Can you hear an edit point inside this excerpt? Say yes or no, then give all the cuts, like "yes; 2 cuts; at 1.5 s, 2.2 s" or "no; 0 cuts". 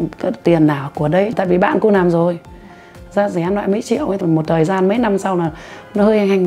yes; 2 cuts; at 1.3 s, 4.2 s